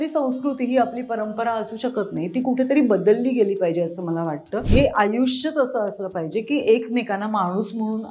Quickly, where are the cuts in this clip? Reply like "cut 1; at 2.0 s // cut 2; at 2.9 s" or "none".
cut 1; at 4.6 s